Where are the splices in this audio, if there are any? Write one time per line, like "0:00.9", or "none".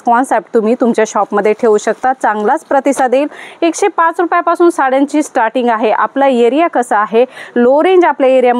none

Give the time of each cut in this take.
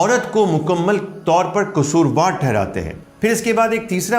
0:03.0

